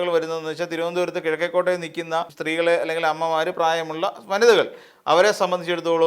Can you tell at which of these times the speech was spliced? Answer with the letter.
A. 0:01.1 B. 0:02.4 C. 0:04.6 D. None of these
B